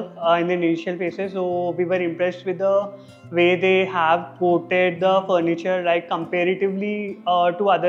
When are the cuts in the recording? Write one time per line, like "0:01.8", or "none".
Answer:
none